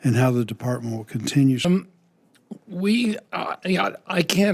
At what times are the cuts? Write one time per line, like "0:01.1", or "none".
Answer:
0:01.6